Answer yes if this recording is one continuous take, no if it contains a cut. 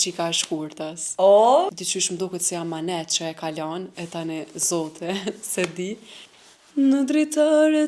no